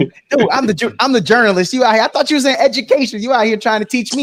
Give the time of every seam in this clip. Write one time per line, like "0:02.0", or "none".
none